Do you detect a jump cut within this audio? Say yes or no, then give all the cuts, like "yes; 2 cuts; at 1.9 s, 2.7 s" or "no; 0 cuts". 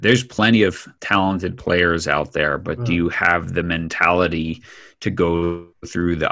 yes; 1 cut; at 0.9 s